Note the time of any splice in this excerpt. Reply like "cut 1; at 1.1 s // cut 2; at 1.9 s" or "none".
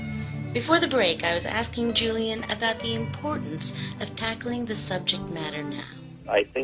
cut 1; at 4.5 s

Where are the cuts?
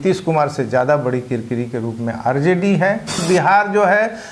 cut 1; at 3.2 s

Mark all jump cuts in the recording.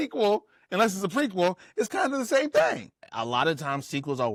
none

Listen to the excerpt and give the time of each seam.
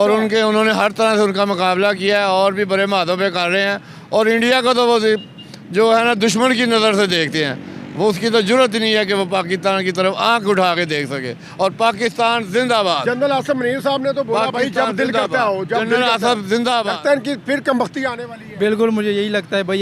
cut 1; at 16.9 s

